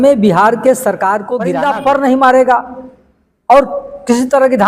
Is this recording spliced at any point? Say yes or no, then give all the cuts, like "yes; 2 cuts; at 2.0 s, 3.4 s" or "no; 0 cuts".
yes; 1 cut; at 1.5 s